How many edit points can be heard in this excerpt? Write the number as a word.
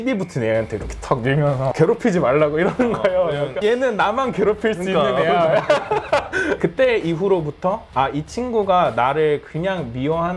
two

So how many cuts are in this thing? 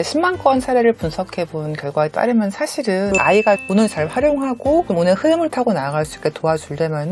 one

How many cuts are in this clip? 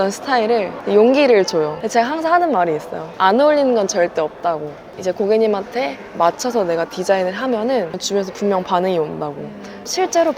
two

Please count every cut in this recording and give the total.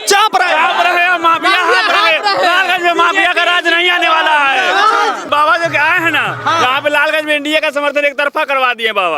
one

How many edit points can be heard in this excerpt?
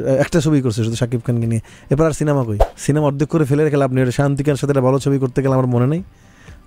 one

